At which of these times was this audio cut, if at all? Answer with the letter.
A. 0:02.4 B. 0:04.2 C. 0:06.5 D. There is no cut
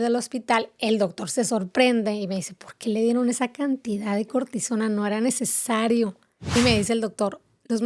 C